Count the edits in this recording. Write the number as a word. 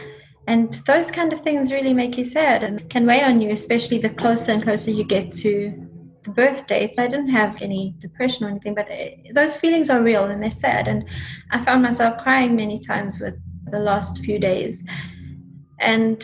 four